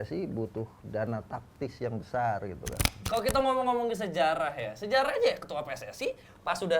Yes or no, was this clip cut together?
yes